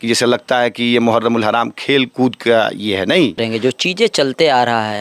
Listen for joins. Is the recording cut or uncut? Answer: cut